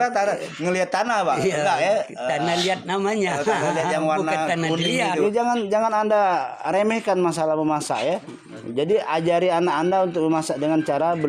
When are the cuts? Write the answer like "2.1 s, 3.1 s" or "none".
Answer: 5.2 s